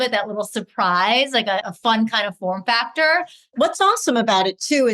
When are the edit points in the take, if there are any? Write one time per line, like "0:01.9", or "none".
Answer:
0:01.7
0:03.5